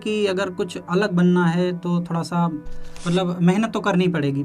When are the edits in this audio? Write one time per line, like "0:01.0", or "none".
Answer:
none